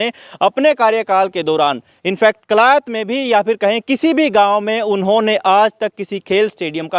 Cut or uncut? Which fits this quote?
uncut